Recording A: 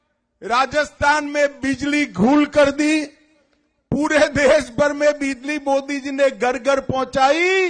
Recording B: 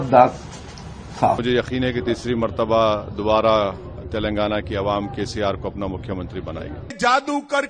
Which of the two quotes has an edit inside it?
B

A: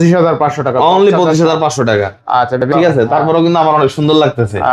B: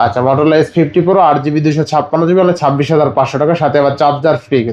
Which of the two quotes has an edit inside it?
A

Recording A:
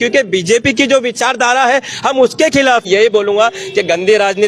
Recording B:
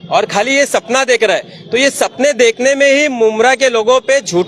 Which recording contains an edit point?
A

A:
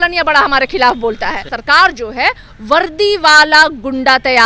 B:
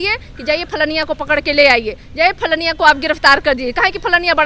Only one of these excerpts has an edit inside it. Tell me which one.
A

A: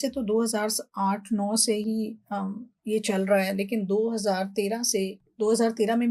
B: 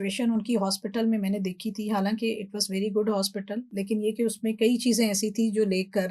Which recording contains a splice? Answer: B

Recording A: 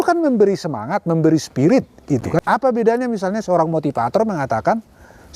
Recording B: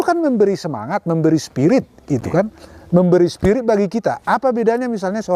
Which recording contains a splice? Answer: A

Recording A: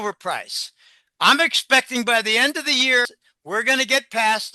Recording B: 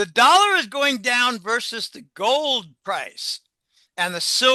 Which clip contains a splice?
A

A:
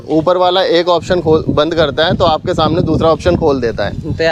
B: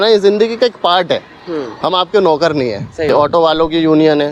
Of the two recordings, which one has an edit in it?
B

